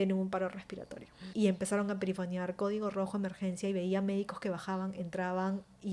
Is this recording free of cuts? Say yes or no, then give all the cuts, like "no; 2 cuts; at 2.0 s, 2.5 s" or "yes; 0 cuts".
no; 1 cut; at 1.2 s